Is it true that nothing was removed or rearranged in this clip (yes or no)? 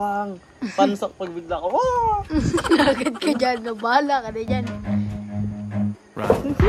yes